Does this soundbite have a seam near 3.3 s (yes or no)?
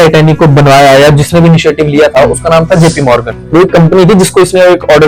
yes